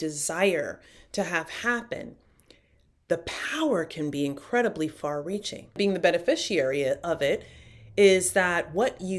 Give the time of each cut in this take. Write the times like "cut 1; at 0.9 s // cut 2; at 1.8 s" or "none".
cut 1; at 5.8 s